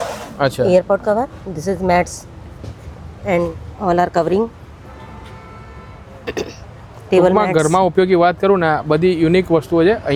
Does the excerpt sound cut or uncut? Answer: uncut